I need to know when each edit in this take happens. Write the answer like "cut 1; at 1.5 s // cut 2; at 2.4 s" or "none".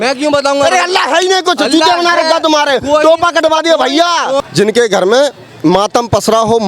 cut 1; at 4.4 s